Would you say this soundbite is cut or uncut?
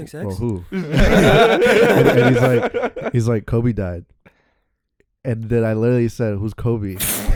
uncut